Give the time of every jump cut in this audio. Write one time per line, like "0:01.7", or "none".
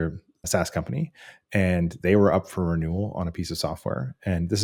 none